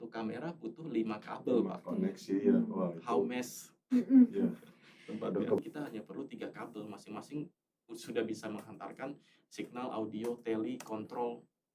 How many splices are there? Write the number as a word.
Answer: one